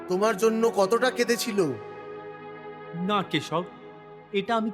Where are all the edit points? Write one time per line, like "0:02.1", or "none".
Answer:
none

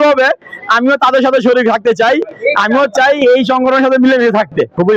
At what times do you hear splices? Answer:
none

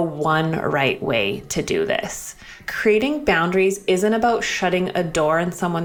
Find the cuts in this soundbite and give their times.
0:02.6

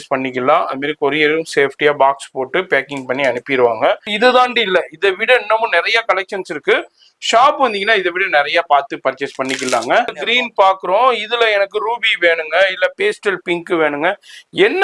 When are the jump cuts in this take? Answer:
0:04.1
0:10.1

